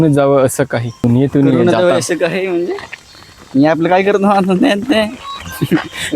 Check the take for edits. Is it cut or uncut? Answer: cut